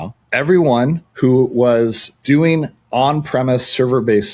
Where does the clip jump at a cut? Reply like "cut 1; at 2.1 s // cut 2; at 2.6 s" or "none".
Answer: cut 1; at 1.0 s